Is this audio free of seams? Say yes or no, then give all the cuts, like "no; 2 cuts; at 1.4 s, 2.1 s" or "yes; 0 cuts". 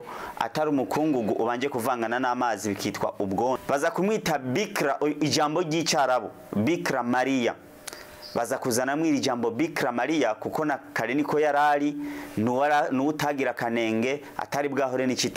no; 1 cut; at 3.6 s